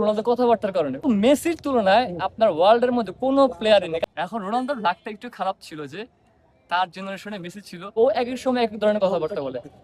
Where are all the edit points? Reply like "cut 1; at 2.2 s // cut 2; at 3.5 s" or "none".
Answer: cut 1; at 1.0 s // cut 2; at 4.0 s // cut 3; at 7.9 s